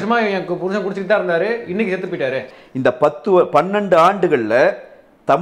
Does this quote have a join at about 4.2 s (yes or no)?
no